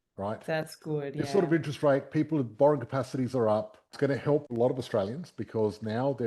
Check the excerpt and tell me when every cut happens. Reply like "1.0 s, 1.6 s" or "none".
4.3 s